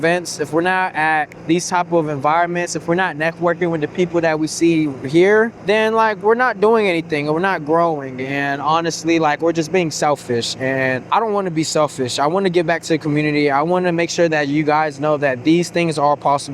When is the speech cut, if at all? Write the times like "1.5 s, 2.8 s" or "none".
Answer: 1.4 s, 5.6 s, 11.0 s